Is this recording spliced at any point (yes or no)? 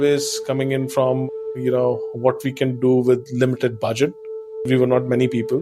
yes